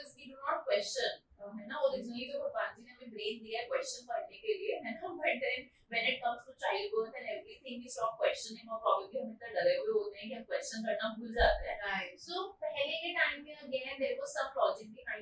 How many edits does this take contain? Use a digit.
0